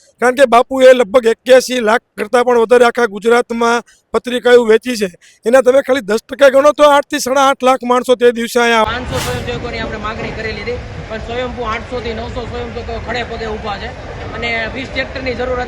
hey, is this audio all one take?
no; 1 cut; at 8.8 s

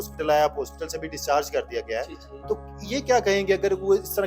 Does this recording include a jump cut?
no; 0 cuts

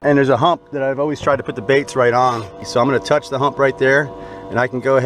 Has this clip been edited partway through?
yes; 1 cut; at 2.6 s

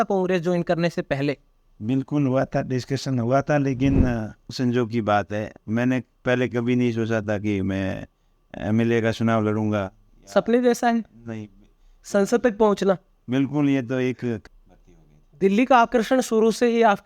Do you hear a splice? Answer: yes; 2 cuts; at 4.5 s, 14.4 s

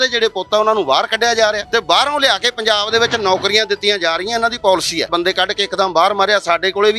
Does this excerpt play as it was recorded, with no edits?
no; 2 cuts; at 1.6 s, 5.1 s

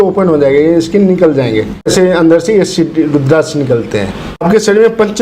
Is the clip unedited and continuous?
no; 2 cuts; at 1.9 s, 4.4 s

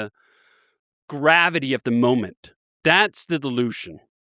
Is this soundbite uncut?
yes; 0 cuts

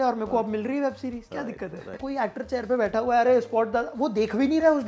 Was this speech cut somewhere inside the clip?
yes; 1 cut; at 2.0 s

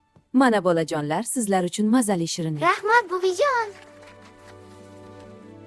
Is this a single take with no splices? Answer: yes; 0 cuts

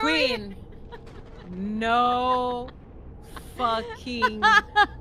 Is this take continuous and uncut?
yes; 0 cuts

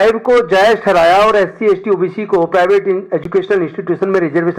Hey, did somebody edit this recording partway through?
no; 0 cuts

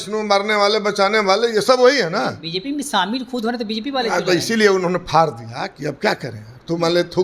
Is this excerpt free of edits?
yes; 0 cuts

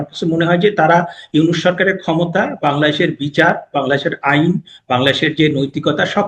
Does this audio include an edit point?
no; 0 cuts

